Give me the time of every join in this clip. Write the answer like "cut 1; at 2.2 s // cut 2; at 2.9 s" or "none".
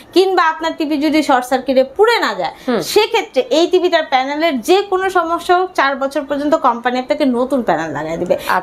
none